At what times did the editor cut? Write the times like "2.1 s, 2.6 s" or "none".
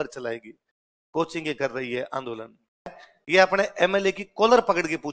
3.0 s